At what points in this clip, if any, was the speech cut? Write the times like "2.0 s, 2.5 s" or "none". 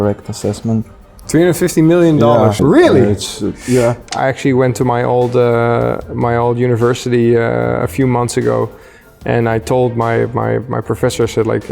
2.6 s, 4.1 s